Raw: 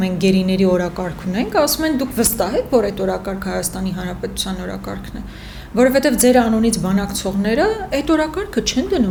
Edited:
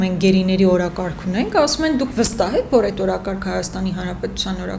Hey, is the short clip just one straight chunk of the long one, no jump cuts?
yes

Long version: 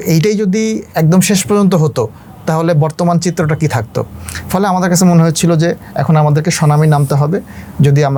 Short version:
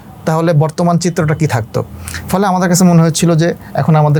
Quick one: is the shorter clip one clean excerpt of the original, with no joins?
yes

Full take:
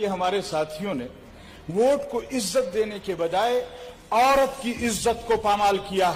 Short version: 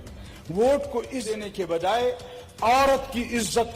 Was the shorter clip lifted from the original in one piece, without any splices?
no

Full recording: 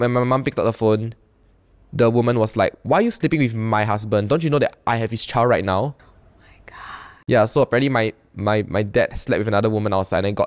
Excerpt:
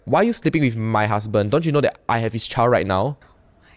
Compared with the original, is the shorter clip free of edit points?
yes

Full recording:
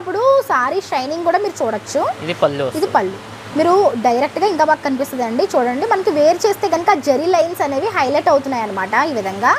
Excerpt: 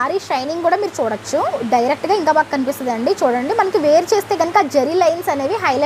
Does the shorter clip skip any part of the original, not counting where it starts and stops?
yes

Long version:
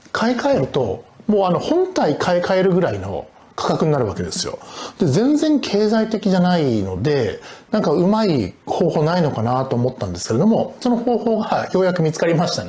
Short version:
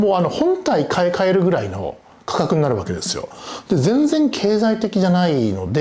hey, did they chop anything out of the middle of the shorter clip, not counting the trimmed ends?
no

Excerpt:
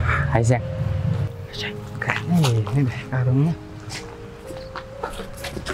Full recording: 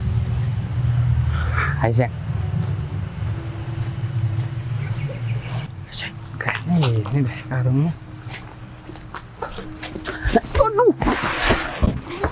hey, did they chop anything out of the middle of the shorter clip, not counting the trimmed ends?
yes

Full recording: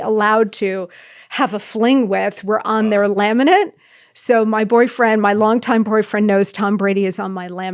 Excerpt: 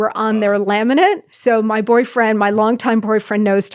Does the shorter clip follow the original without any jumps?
no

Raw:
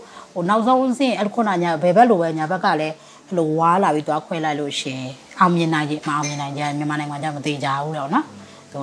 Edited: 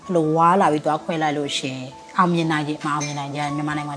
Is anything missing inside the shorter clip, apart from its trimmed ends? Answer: no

